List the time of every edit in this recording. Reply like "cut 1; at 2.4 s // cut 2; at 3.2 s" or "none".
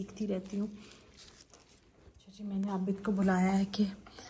none